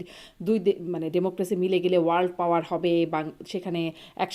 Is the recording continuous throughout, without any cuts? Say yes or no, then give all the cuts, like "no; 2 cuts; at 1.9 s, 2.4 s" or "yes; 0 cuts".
yes; 0 cuts